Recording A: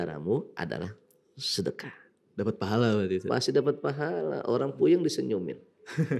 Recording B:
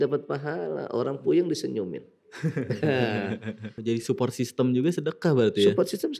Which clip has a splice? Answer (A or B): B